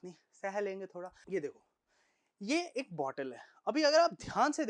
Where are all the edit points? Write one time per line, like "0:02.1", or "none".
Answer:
0:01.2